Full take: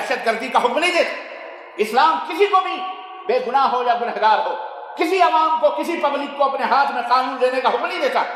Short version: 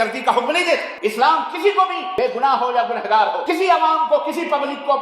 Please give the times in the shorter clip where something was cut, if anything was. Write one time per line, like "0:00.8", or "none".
0:00.9
0:02.0
0:03.4